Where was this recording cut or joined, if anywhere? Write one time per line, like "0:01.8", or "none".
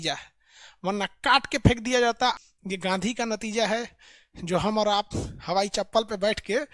0:02.4